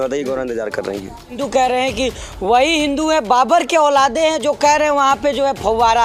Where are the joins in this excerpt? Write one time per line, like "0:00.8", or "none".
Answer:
0:01.3